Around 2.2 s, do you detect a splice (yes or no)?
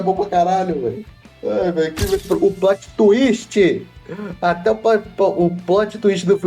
yes